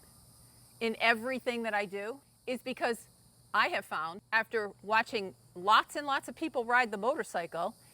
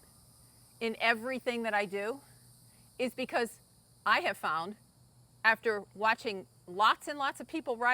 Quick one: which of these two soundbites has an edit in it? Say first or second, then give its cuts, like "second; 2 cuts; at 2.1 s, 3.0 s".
first; 2 cuts; at 2.3 s, 4.2 s